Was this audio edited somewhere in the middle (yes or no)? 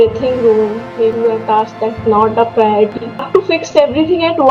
yes